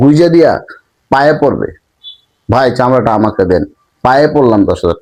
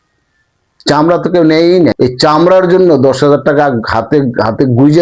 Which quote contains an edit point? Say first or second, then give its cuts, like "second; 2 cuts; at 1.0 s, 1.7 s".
second; 1 cut; at 1.9 s